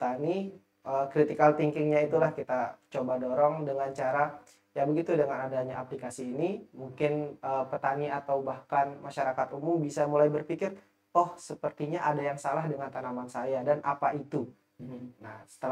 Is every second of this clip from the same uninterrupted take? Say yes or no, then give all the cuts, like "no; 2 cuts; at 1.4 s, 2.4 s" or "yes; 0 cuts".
yes; 0 cuts